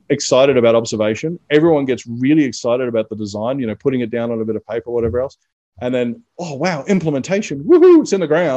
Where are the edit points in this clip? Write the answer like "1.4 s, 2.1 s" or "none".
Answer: none